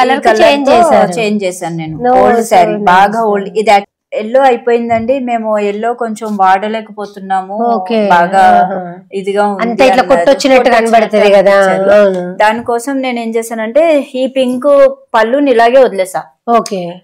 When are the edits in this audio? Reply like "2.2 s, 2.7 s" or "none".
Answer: 3.9 s